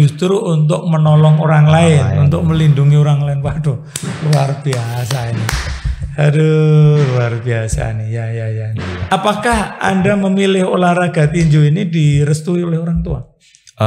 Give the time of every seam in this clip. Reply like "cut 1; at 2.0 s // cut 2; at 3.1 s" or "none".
none